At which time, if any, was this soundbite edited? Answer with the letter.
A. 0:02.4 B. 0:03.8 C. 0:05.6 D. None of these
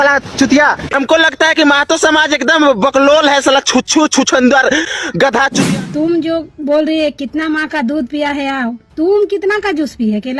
C